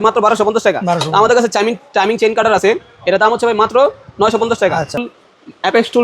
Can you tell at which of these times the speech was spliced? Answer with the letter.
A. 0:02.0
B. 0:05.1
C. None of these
B